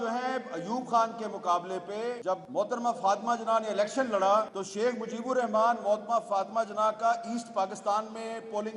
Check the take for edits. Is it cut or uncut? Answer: cut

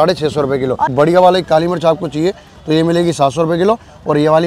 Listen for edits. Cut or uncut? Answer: cut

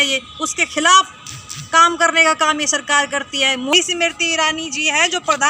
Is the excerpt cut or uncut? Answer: cut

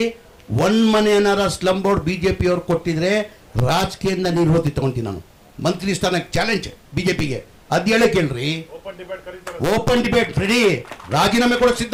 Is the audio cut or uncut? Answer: uncut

